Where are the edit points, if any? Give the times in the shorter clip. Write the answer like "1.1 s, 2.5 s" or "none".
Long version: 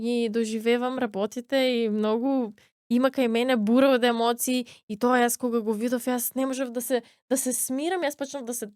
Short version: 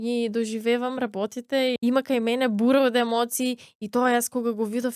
1.8 s